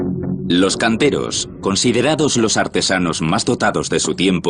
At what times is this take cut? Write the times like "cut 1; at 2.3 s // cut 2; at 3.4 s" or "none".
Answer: cut 1; at 2.8 s